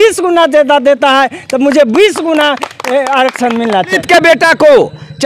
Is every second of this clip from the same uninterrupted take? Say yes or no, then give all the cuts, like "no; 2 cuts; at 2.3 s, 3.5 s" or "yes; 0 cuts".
no; 1 cut; at 3.9 s